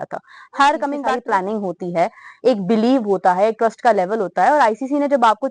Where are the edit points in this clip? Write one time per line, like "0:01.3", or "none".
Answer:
0:01.1

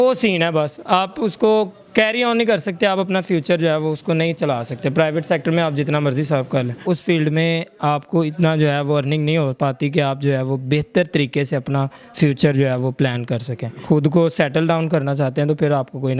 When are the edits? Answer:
0:06.8
0:13.7

